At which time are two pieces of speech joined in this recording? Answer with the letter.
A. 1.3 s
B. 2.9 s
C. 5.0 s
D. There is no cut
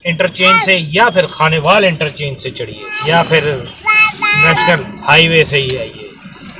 B